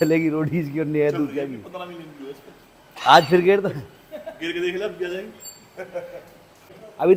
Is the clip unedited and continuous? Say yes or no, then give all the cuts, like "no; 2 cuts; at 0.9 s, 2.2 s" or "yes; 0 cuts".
yes; 0 cuts